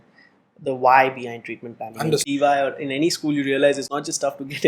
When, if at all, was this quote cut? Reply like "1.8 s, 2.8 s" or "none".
2.3 s